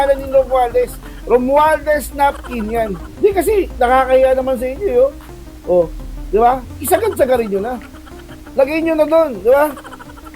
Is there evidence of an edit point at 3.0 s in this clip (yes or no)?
yes